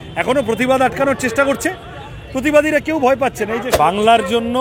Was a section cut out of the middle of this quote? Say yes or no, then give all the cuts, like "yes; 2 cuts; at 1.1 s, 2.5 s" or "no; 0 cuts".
yes; 1 cut; at 3.7 s